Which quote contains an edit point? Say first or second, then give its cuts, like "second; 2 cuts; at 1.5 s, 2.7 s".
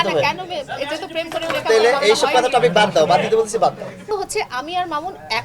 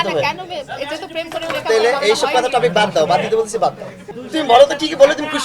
first; 1 cut; at 4.1 s